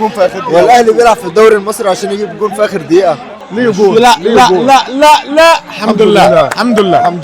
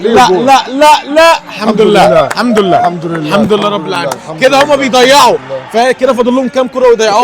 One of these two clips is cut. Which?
first; 1 cut; at 3.3 s

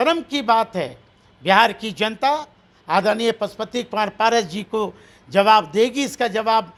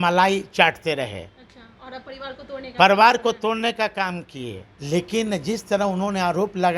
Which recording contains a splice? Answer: second; 1 cut; at 4.7 s

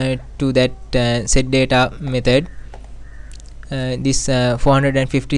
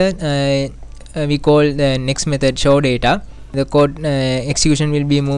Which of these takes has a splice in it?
second; 1 cut; at 3.5 s

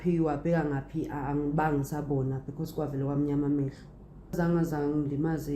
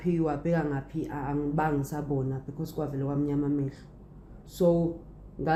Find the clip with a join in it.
first; 1 cut; at 4.3 s

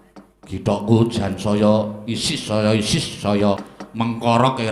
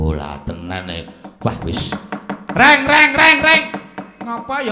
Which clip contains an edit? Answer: first; 1 cut; at 3.8 s

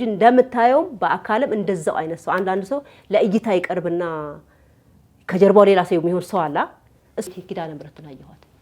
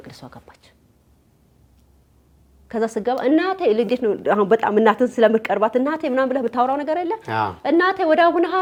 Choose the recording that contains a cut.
first; 1 cut; at 7.3 s

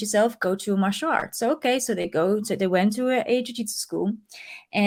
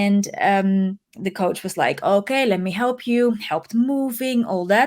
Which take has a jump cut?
second; 1 cut; at 1.1 s

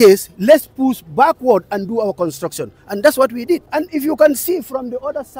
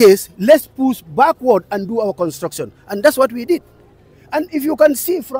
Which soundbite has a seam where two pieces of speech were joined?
first; 1 cut; at 3.7 s

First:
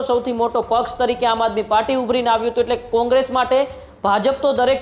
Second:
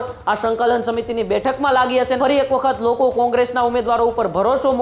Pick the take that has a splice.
second; 1 cut; at 2.2 s

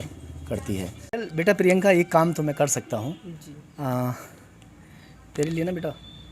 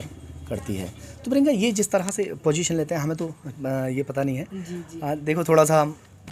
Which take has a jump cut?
first; 1 cut; at 1.1 s

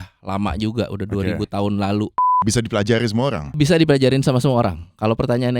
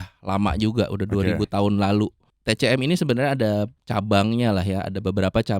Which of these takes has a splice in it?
first; 2 cuts; at 2.4 s, 3.5 s

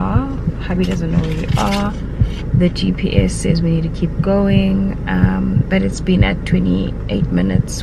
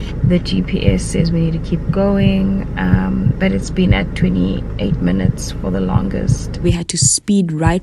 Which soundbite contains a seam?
second; 1 cut; at 6.6 s

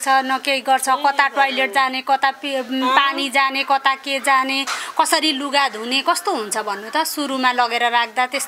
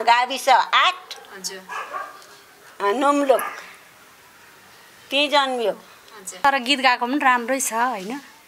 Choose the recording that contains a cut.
second; 1 cut; at 6.4 s

